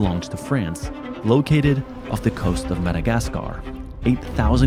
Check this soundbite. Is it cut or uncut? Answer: uncut